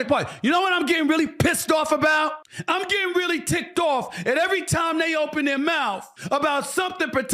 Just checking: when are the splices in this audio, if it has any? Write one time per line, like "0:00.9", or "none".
0:02.5
0:06.1